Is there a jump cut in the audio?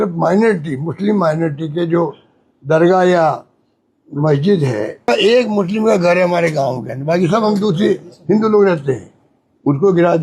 yes; 1 cut; at 5.1 s

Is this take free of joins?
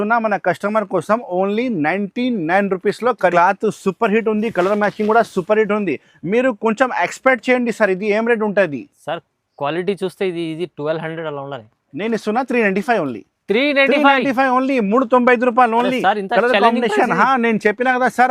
no; 1 cut; at 3.3 s

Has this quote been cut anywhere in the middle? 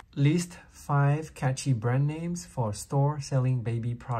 no; 0 cuts

